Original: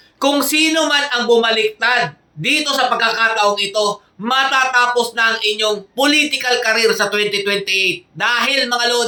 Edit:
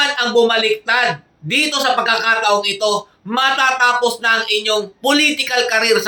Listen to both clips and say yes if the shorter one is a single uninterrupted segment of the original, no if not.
yes